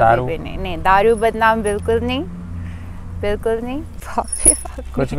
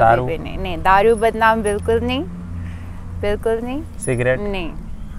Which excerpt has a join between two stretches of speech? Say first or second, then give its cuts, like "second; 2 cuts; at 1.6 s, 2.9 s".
first; 1 cut; at 4.0 s